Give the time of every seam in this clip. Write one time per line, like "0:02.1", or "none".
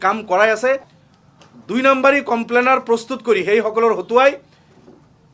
0:00.9